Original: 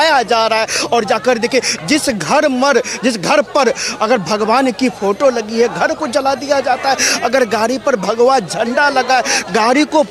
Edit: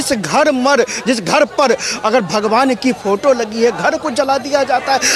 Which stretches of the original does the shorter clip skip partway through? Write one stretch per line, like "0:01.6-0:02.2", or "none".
none